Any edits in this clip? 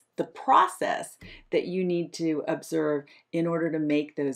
no; 0 cuts

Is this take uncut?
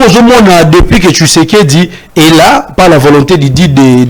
yes; 0 cuts

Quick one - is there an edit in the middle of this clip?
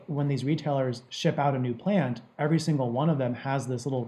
no; 0 cuts

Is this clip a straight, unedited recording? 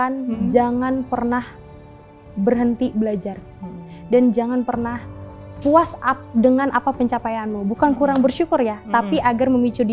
yes; 0 cuts

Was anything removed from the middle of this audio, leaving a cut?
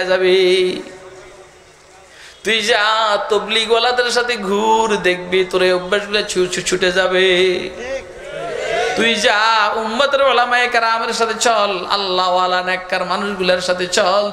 no; 0 cuts

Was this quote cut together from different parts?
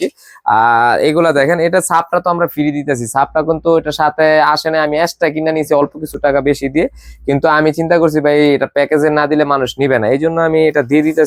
no; 0 cuts

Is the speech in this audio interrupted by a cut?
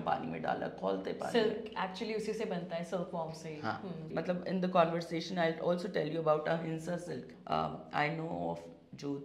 yes; 2 cuts; at 4.1 s, 7.3 s

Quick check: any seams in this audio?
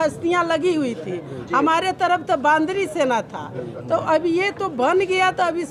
no; 0 cuts

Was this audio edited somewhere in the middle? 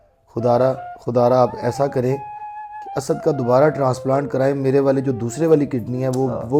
no; 0 cuts

